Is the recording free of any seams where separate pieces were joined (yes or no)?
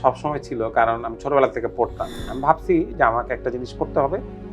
no